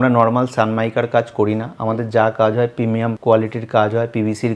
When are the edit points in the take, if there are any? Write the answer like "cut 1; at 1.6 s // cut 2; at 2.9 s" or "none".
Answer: cut 1; at 3.2 s